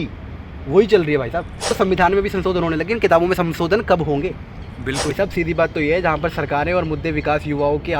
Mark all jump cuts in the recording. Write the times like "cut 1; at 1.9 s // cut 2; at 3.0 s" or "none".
cut 1; at 1.6 s // cut 2; at 5.1 s